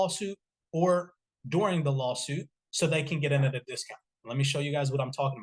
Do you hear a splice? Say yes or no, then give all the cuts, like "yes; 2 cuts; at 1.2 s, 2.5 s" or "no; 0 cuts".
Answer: yes; 1 cut; at 2.6 s